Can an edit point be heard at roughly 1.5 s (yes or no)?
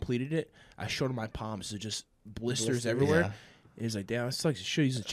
no